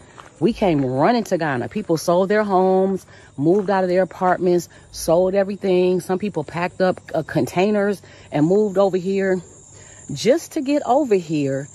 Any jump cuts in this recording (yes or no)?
no